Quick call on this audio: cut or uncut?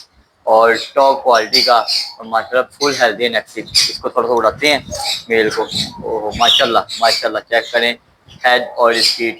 uncut